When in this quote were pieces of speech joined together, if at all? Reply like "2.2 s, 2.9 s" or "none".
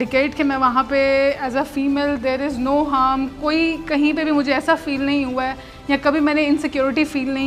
none

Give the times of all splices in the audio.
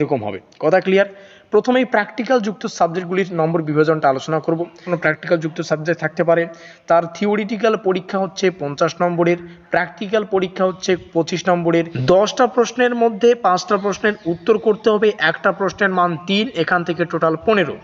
4.8 s, 11.9 s

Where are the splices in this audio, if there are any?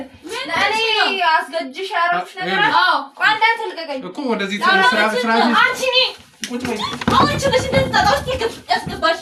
none

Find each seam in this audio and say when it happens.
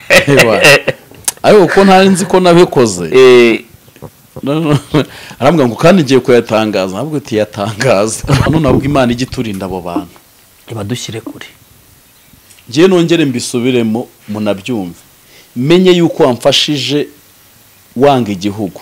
8.5 s

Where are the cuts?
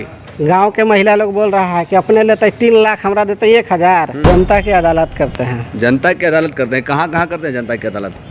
4.2 s

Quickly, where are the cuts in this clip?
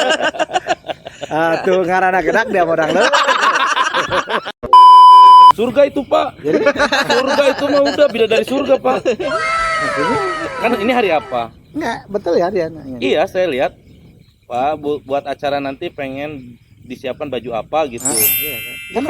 4.6 s, 5.6 s

